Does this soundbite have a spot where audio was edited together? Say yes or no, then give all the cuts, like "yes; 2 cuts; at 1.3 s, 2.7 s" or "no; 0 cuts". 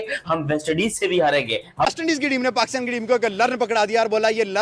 yes; 1 cut; at 1.9 s